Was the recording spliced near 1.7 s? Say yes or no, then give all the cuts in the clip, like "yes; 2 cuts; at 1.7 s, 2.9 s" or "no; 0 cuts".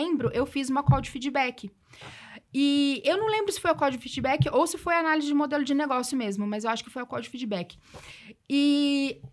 no; 0 cuts